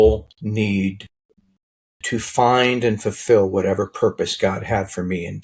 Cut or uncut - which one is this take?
uncut